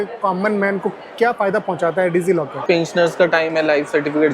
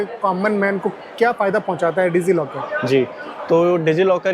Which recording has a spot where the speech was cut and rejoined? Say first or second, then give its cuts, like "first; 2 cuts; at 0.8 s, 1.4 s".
first; 1 cut; at 2.6 s